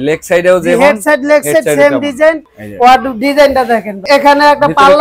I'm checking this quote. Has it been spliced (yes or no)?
yes